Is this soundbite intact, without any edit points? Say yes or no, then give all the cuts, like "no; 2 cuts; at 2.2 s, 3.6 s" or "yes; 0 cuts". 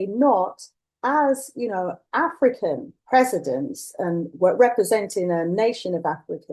no; 1 cut; at 2.9 s